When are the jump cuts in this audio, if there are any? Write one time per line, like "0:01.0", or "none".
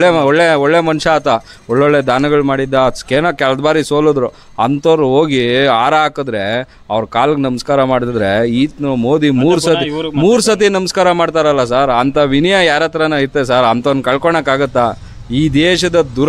none